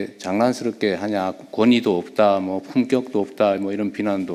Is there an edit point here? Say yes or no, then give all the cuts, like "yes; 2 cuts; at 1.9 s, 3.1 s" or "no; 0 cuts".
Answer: no; 0 cuts